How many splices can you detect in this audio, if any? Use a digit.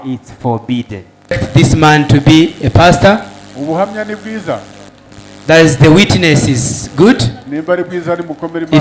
1